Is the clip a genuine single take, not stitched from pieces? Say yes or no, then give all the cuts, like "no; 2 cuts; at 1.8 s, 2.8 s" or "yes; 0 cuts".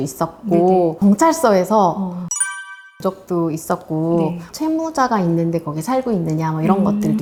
yes; 0 cuts